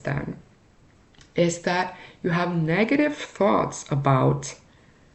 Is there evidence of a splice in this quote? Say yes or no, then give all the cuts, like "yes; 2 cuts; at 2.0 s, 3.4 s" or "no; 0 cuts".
no; 0 cuts